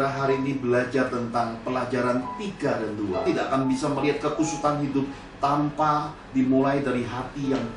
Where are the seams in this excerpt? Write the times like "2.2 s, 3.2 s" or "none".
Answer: 3.6 s